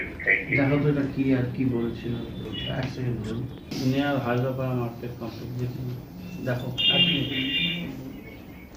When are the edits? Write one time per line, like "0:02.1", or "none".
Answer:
0:02.4

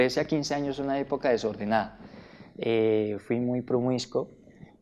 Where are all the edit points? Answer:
none

